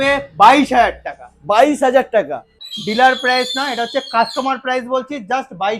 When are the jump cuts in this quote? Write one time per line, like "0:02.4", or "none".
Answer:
0:02.6